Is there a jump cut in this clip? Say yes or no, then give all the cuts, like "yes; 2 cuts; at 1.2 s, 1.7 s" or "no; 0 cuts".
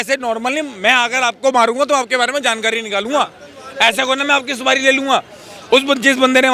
no; 0 cuts